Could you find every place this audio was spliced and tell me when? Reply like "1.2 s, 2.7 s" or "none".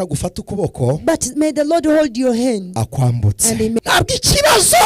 3.8 s